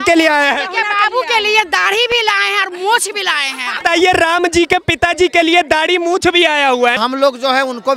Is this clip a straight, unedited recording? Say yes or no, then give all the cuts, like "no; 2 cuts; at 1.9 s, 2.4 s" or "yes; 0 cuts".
no; 2 cuts; at 3.8 s, 7.0 s